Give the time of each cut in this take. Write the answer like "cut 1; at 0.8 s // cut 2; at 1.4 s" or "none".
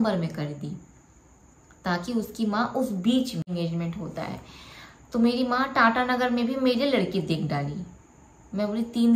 cut 1; at 3.5 s

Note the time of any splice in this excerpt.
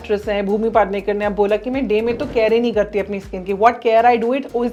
none

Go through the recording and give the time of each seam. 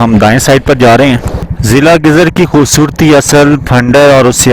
cut 1; at 1.3 s

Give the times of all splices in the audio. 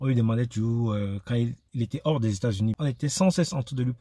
cut 1; at 2.8 s

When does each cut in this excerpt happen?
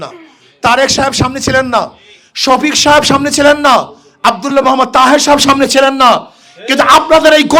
none

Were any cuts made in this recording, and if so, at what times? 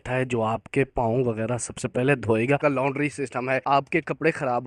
cut 1; at 2.6 s // cut 2; at 3.6 s

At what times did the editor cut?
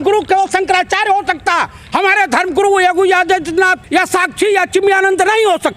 cut 1; at 3.8 s

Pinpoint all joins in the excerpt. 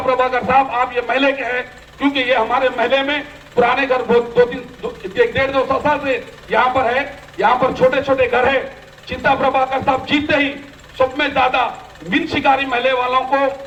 none

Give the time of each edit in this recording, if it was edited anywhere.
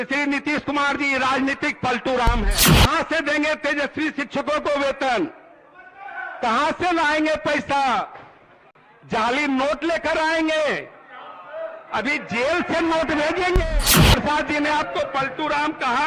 cut 1; at 2.8 s // cut 2; at 14.1 s

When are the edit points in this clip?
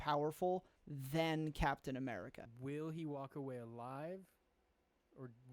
cut 1; at 2.4 s

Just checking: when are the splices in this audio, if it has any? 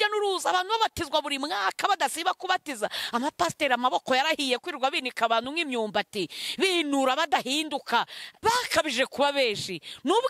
cut 1; at 8.2 s

